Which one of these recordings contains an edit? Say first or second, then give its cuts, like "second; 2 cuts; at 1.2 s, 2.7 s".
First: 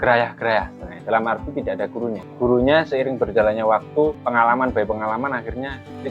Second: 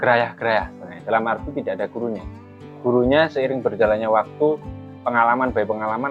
first; 2 cuts; at 2.3 s, 4.2 s